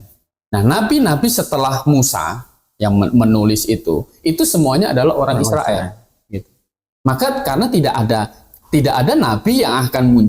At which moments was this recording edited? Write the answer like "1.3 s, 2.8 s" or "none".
none